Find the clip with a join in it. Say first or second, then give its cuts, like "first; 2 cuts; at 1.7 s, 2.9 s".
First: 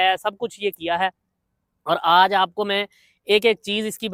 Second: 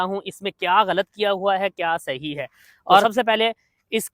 second; 1 cut; at 3.0 s